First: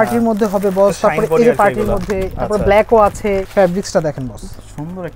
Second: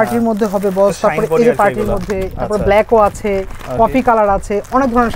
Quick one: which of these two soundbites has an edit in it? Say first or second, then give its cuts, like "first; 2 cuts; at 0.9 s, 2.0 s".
first; 1 cut; at 3.5 s